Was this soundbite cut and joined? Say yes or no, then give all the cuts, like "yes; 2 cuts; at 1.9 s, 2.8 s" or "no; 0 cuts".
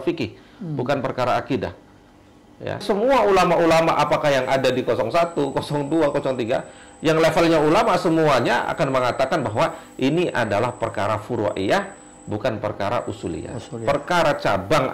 yes; 1 cut; at 2.8 s